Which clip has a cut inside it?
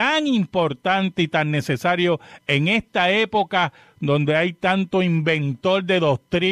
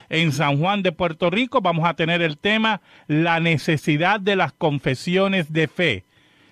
first; 1 cut; at 4.9 s

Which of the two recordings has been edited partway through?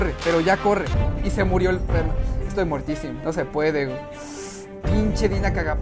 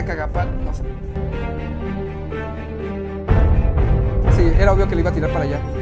first; 1 cut; at 1.0 s

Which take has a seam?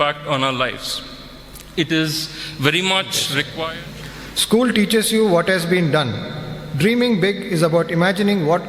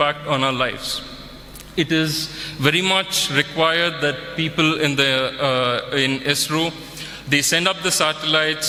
first; 1 cut; at 3.7 s

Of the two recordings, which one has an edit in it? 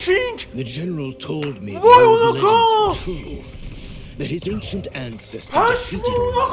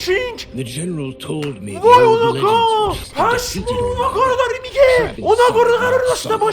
second; 2 cuts; at 3.0 s, 5.1 s

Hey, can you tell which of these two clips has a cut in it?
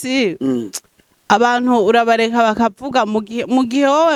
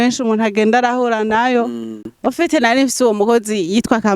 second; 1 cut; at 2.1 s

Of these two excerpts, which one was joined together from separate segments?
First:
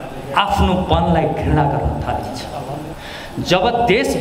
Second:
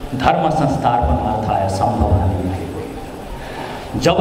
first; 1 cut; at 2.9 s

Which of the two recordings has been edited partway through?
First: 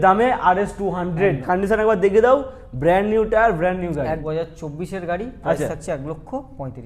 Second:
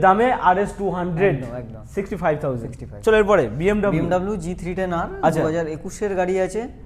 first; 2 cuts; at 1.4 s, 4.2 s

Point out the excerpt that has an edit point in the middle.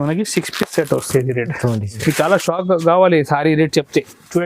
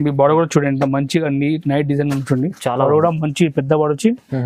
first; 1 cut; at 1.9 s

